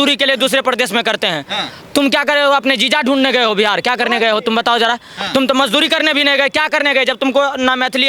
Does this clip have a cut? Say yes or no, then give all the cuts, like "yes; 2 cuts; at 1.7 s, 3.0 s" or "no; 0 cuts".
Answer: no; 0 cuts